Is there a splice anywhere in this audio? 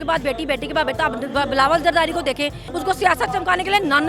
yes; 1 cut; at 2.6 s

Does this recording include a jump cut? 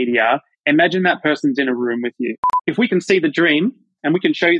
yes; 1 cut; at 2.5 s

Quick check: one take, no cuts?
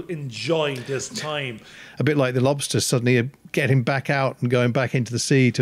no; 1 cut; at 1.7 s

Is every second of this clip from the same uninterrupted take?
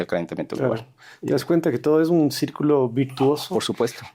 yes; 0 cuts

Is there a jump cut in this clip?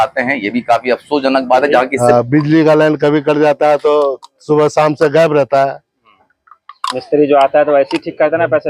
yes; 1 cut; at 1.9 s

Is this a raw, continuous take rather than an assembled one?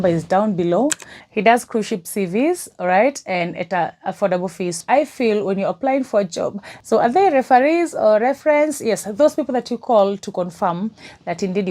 no; 1 cut; at 4.8 s

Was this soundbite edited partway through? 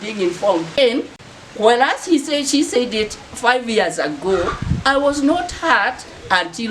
yes; 1 cut; at 1.0 s

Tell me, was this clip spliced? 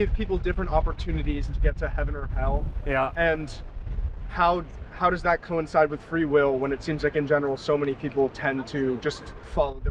no; 0 cuts

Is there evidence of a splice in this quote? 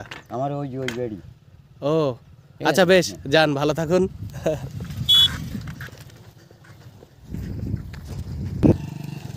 no; 0 cuts

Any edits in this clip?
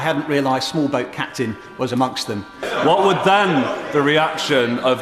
yes; 1 cut; at 2.6 s

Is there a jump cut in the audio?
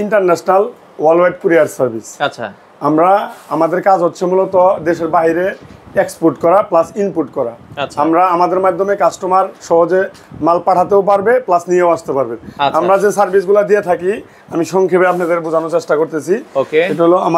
no; 0 cuts

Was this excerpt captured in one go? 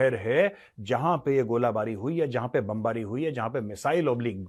yes; 0 cuts

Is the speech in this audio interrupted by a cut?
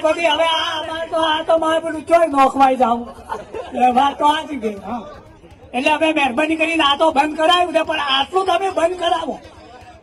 no; 0 cuts

